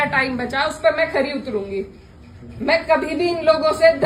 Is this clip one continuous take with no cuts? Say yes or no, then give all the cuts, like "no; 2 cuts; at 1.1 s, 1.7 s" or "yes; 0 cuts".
yes; 0 cuts